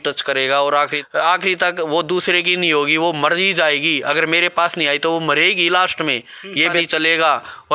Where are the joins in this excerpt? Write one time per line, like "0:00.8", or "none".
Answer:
0:01.0
0:06.8